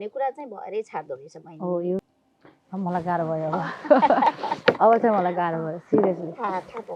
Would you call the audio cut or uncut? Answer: cut